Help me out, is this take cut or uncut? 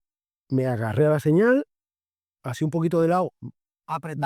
uncut